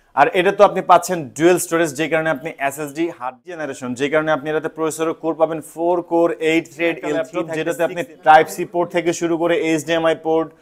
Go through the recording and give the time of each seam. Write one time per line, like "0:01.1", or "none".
0:03.7
0:07.5